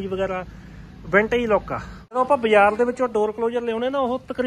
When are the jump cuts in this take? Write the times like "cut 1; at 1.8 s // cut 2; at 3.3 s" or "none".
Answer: cut 1; at 2.2 s